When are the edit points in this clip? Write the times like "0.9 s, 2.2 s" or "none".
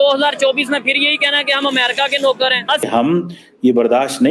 2.8 s